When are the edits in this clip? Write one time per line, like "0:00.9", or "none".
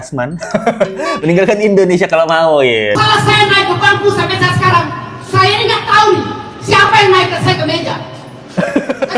0:03.0